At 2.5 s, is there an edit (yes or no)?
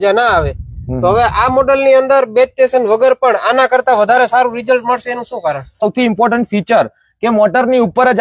no